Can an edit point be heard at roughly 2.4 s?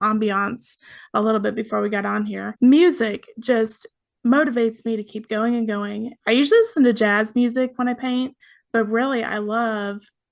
yes; 2 cuts; at 2.4 s, 6.1 s

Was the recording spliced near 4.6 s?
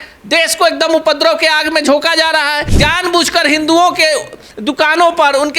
no; 1 cut; at 2.6 s

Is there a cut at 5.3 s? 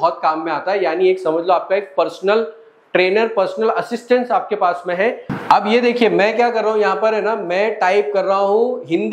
yes; 1 cut; at 5.3 s

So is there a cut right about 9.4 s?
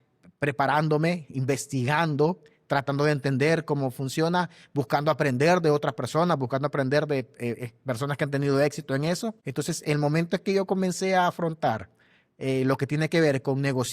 yes; 1 cut; at 9.4 s

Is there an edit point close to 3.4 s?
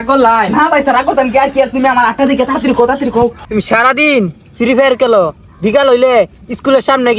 yes; 1 cut; at 3.4 s

